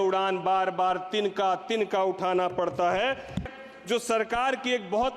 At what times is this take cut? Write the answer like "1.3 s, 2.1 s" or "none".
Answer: 3.5 s